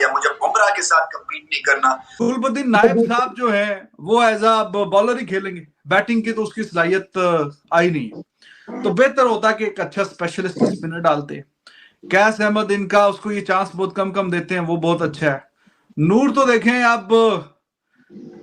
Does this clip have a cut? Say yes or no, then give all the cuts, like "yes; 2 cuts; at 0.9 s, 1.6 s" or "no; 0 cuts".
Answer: yes; 1 cut; at 2.1 s